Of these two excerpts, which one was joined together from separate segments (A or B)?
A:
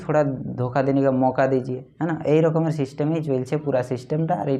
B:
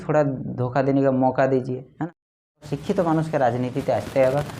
B